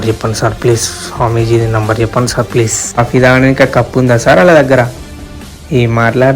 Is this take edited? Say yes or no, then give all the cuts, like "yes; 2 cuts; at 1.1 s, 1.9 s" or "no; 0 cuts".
yes; 1 cut; at 3.0 s